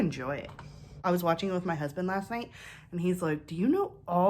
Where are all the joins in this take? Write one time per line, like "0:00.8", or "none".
0:00.9